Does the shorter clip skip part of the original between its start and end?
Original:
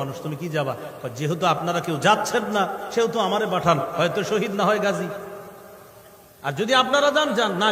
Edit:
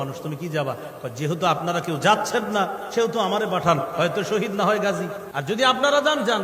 yes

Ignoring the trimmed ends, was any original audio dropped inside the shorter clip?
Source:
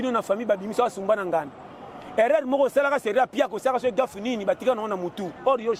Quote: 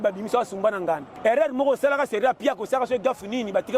yes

